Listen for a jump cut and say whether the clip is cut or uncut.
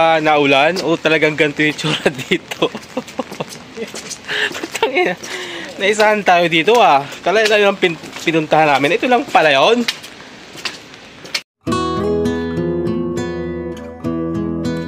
uncut